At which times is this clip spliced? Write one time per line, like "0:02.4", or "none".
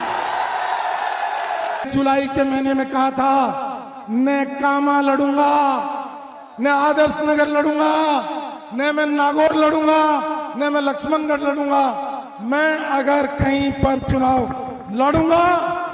0:01.9